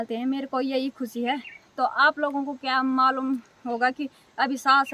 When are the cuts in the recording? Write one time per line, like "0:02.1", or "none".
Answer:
none